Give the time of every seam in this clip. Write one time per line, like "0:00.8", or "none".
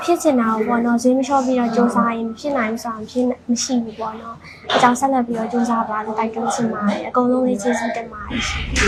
none